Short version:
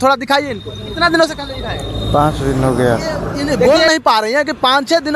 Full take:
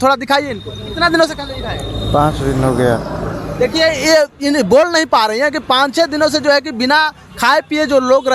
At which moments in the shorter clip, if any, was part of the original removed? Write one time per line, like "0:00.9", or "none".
0:03.4